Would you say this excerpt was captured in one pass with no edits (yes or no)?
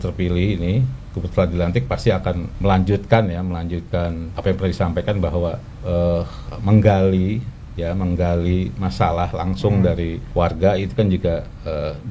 no